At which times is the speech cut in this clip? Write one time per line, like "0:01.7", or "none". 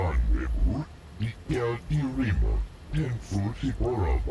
0:00.9